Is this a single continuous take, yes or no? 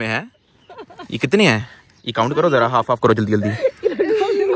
yes